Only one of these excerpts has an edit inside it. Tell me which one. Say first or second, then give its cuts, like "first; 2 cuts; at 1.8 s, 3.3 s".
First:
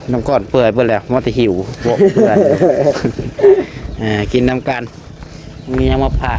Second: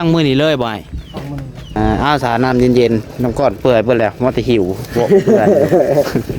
second; 1 cut; at 1.8 s